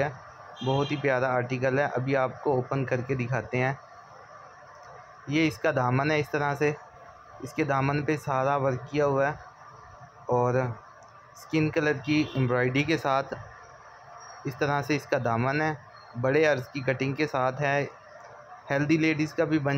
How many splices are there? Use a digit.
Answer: 0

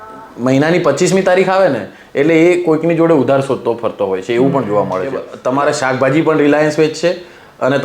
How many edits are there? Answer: 1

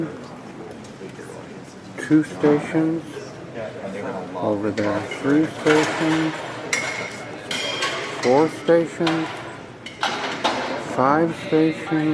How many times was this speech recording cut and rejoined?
1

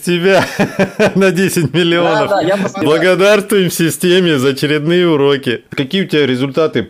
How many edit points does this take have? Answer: 2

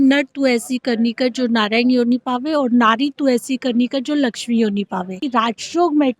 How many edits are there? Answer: 1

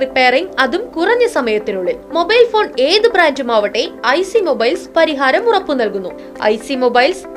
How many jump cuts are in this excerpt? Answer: 1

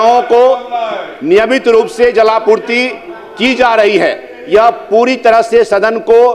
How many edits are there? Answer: 0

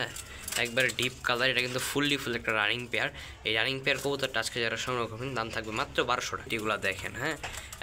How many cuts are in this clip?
1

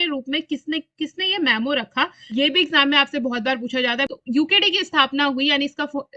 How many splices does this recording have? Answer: 2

